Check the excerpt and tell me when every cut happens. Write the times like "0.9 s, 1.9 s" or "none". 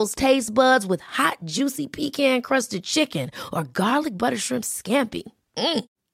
none